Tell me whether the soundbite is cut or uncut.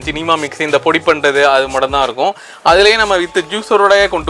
uncut